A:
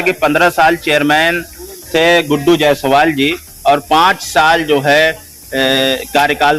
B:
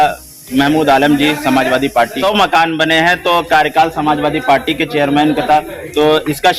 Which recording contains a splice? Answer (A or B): B